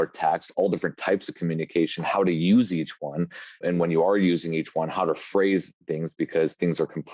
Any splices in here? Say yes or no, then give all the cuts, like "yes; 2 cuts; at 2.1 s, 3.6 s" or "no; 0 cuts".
yes; 1 cut; at 3.6 s